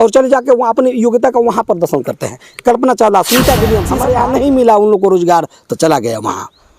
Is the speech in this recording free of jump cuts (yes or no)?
no